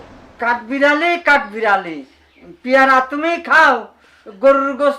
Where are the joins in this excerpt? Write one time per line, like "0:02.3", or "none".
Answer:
none